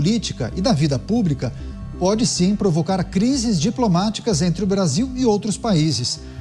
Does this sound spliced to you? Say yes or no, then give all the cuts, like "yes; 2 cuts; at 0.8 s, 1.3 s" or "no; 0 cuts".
no; 0 cuts